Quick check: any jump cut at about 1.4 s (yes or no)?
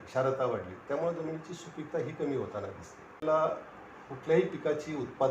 no